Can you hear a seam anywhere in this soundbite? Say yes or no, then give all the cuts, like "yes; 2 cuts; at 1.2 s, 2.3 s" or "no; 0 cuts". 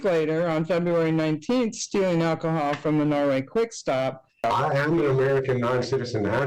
yes; 1 cut; at 4.4 s